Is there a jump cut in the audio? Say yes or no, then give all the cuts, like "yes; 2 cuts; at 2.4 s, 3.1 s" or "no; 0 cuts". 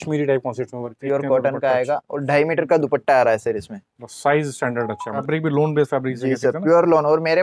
yes; 2 cuts; at 1.0 s, 5.1 s